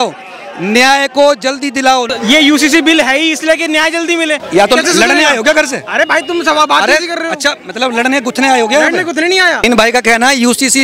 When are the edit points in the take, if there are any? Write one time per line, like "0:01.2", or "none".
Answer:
0:02.1
0:04.4
0:09.6